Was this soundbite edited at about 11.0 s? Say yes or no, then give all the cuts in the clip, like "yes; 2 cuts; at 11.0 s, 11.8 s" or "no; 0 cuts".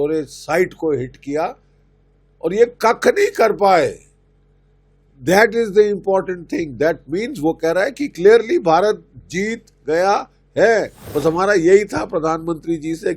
yes; 1 cut; at 11.0 s